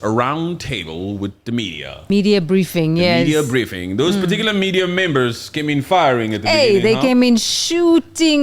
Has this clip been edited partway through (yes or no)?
yes